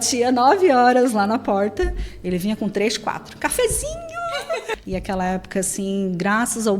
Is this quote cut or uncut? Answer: cut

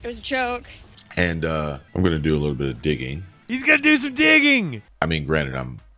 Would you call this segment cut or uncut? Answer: cut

